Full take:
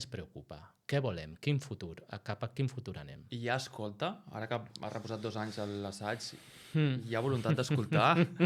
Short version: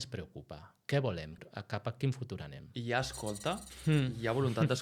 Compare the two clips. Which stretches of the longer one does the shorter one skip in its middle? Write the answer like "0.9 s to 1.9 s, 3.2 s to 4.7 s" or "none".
1.4 s to 1.9 s, 4.2 s to 6.6 s